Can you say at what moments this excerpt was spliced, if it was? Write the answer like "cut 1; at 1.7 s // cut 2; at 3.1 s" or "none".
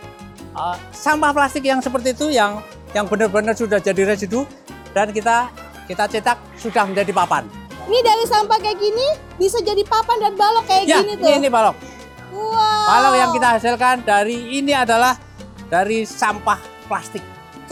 none